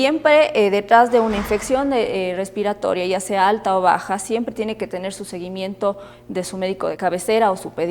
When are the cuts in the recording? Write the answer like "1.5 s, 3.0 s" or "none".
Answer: 7.0 s